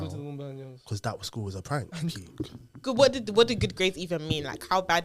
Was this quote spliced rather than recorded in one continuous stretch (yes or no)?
yes